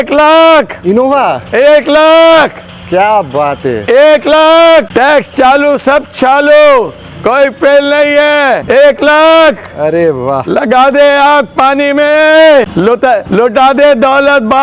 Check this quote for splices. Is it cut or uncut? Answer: uncut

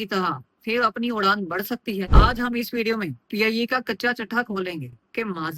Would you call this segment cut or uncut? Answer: cut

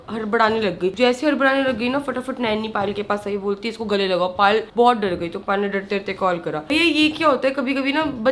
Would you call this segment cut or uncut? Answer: uncut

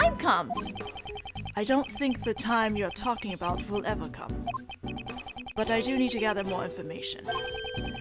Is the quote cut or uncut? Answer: cut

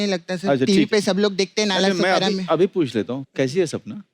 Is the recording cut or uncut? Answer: cut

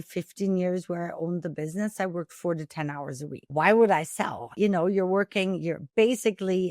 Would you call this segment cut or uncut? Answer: cut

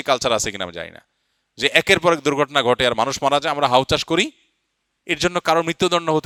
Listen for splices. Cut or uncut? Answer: uncut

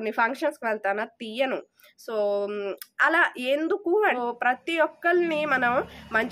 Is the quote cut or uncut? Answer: cut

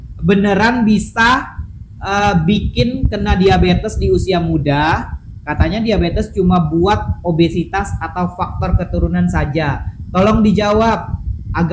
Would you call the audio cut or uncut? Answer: uncut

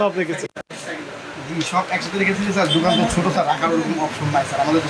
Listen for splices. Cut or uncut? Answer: uncut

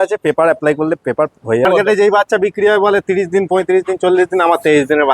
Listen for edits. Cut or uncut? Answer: cut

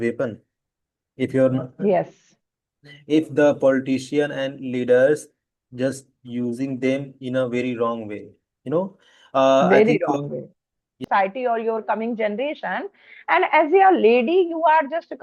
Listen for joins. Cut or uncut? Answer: cut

